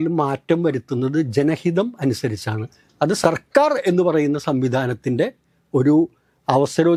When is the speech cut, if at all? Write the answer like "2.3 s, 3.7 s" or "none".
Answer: none

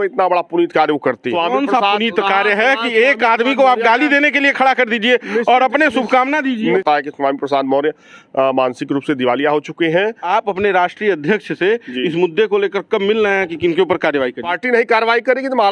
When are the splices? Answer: 1.3 s, 6.8 s, 10.2 s, 14.6 s

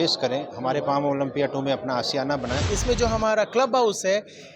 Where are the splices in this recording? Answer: 2.7 s

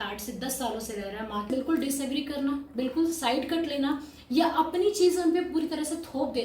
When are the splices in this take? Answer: 1.5 s

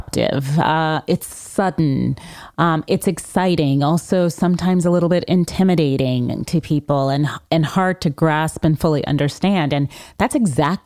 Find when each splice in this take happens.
none

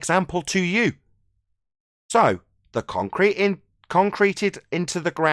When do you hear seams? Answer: none

